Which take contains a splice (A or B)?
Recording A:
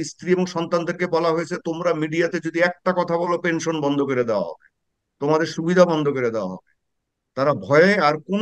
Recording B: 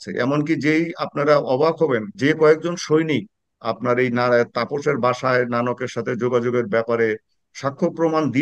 B